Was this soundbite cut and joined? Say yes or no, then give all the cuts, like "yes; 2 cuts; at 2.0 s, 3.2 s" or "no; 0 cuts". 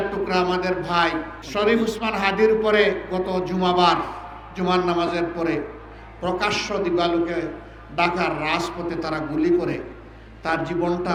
no; 0 cuts